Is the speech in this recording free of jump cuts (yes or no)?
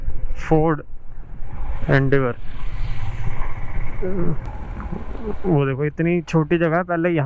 no